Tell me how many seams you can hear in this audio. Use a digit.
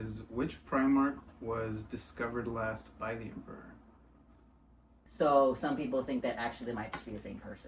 1